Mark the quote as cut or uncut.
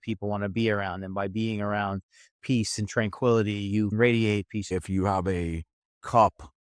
cut